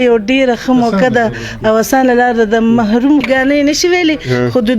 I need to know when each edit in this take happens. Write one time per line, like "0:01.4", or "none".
0:03.2